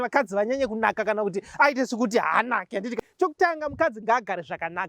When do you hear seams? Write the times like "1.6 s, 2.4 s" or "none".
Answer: 3.0 s